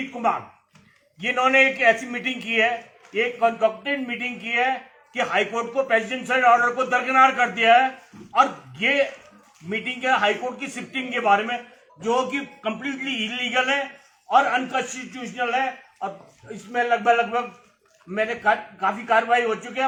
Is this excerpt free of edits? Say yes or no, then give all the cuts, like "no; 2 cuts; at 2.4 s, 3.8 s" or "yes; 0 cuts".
yes; 0 cuts